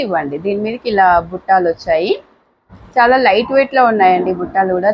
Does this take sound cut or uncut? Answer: uncut